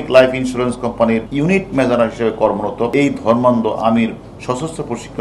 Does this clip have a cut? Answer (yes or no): yes